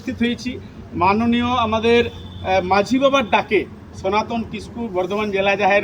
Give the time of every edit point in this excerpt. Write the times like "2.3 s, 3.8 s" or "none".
none